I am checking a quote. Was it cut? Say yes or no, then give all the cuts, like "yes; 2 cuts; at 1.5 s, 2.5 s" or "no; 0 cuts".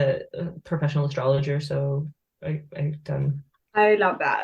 yes; 1 cut; at 3.5 s